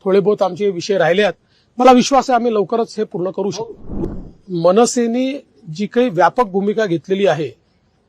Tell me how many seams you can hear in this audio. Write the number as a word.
one